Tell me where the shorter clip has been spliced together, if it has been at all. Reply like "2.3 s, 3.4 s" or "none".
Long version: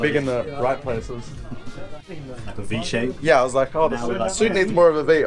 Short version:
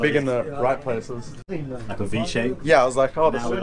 1.3 s